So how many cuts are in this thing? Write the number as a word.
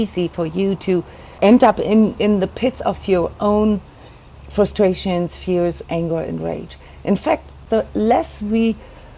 two